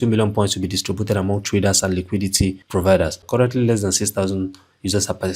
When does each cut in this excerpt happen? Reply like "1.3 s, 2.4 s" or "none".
3.2 s